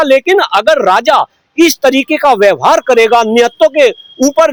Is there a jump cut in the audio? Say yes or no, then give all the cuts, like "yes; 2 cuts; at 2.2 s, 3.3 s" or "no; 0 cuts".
no; 0 cuts